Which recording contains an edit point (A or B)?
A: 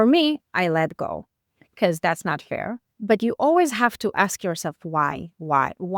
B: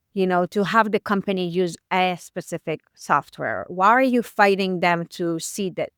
A